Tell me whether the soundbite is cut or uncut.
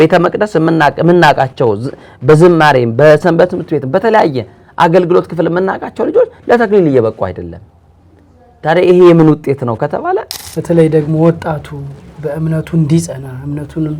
cut